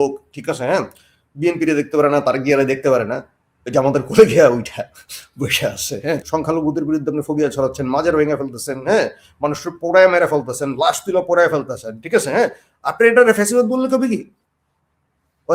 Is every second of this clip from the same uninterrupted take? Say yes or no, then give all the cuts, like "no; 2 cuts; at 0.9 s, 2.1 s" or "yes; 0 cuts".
no; 1 cut; at 6.2 s